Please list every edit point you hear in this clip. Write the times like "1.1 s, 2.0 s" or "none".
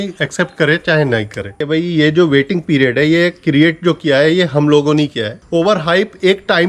1.6 s, 5.3 s